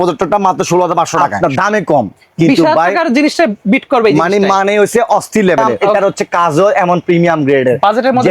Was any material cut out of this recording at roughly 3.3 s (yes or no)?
no